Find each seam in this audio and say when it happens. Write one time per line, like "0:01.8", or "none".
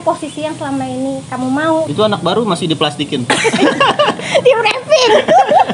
0:01.9